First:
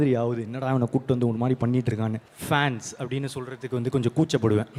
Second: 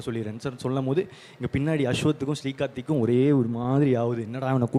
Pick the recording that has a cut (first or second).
first